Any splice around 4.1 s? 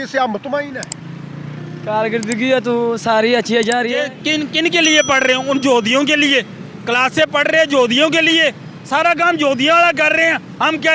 yes; 1 cut; at 4.1 s

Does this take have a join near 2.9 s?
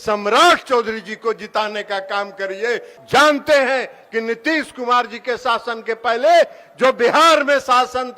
yes; 1 cut; at 2.9 s

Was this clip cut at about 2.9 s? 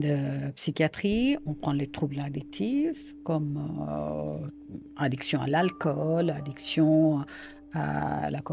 no; 0 cuts

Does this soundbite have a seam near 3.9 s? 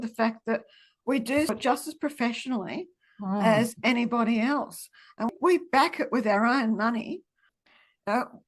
no; 3 cuts; at 1.6 s, 5.3 s, 7.6 s

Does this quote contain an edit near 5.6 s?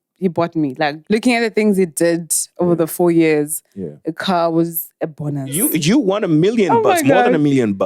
yes; 2 cuts; at 1.0 s, 5.6 s

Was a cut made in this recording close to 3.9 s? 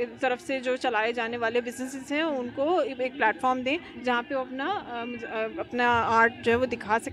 no; 0 cuts

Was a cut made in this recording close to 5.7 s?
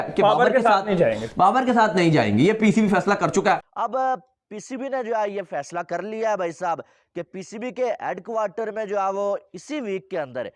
no; 1 cut; at 3.7 s

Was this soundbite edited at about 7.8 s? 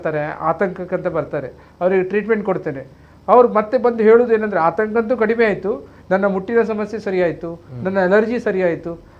no; 0 cuts

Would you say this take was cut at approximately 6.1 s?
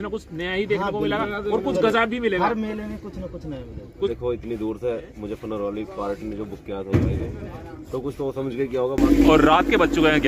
no; 2 cuts; at 4.1 s, 9.0 s

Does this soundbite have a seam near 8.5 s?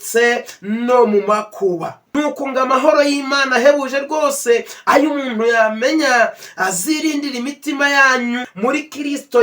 yes; 2 cuts; at 2.0 s, 8.5 s

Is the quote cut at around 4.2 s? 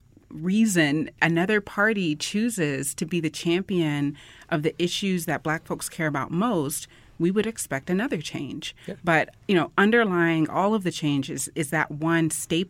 no; 0 cuts

